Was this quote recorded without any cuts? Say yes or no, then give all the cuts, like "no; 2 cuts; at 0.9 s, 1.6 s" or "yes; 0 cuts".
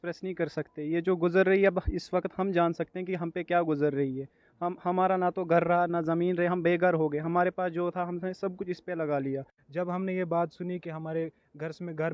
no; 1 cut; at 9.6 s